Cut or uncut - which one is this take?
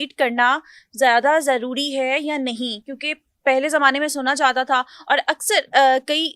uncut